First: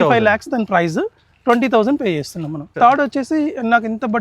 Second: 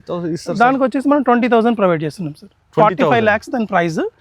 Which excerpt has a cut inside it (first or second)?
first